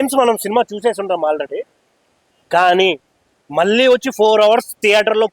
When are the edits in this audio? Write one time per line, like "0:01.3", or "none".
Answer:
none